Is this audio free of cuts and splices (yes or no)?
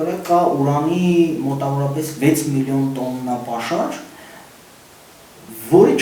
yes